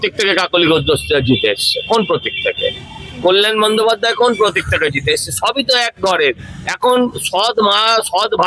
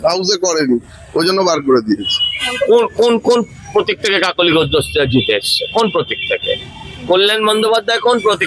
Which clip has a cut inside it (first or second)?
second